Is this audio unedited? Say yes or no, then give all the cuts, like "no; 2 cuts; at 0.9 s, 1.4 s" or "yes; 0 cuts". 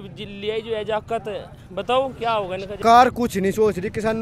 no; 1 cut; at 2.8 s